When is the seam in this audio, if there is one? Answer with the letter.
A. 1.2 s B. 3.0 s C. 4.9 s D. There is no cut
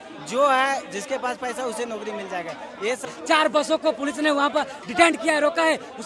B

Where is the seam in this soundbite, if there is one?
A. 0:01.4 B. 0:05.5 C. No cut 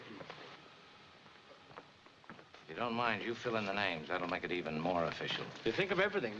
B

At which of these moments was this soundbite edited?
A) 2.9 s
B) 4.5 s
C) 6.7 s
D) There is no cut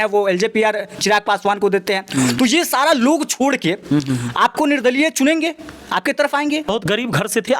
C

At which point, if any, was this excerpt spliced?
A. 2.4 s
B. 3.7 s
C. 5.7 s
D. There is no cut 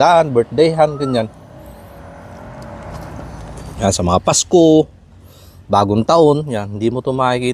B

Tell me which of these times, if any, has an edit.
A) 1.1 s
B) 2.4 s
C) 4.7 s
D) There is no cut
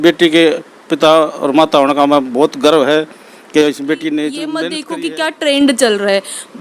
C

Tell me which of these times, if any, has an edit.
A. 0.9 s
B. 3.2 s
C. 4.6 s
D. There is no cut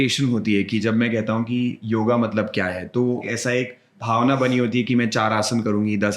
B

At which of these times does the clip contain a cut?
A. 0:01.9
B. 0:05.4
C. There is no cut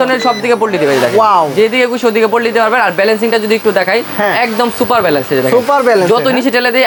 C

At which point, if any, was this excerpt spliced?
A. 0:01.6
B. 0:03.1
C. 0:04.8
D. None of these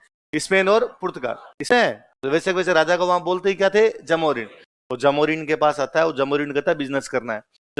A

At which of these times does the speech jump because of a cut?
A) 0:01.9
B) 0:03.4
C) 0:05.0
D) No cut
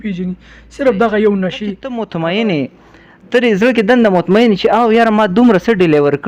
A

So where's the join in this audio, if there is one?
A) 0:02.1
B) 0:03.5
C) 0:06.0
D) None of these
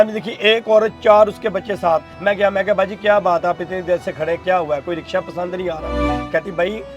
A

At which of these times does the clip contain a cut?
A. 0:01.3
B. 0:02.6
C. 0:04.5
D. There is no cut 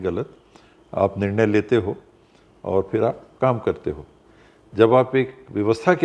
D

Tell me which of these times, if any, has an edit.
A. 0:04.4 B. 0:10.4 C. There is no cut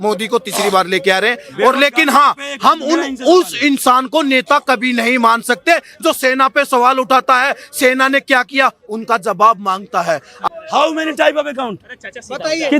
B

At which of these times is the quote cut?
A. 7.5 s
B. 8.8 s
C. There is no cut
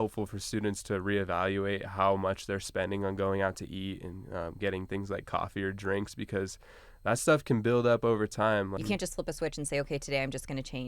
B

